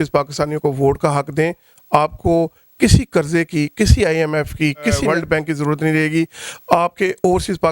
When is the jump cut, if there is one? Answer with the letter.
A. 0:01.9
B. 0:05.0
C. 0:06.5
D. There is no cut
B